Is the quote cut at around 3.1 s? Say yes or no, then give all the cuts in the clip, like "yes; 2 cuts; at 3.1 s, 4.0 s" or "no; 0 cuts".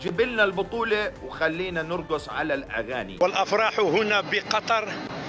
yes; 1 cut; at 3.1 s